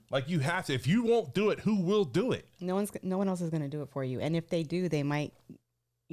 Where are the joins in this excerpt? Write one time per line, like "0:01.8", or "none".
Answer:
none